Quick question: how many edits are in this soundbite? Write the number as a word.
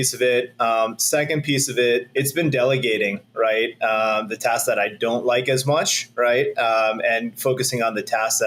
one